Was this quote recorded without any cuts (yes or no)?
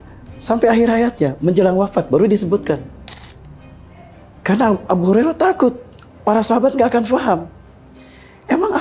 yes